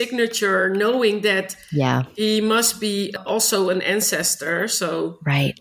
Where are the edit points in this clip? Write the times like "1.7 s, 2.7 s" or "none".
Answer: none